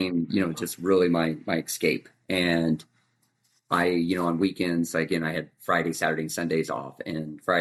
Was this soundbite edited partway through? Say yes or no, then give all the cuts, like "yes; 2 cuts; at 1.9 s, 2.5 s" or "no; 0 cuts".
no; 0 cuts